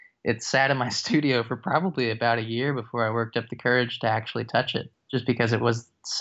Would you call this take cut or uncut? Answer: cut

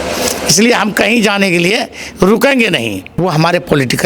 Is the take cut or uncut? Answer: cut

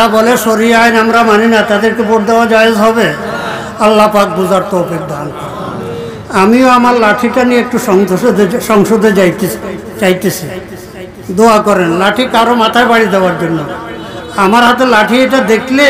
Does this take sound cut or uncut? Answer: uncut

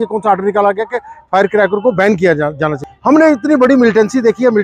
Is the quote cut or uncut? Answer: cut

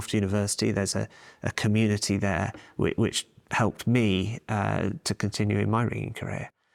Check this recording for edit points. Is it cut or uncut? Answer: uncut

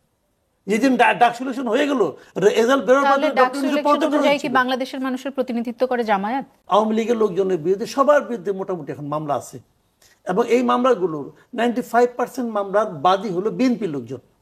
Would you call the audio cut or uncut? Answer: cut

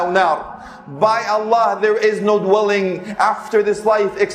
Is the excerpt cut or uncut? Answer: uncut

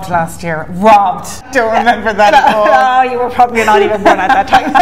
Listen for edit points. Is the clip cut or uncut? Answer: cut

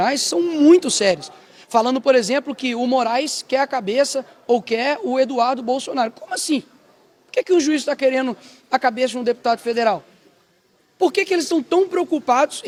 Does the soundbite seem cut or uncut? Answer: uncut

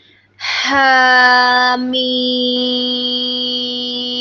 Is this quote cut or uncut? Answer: uncut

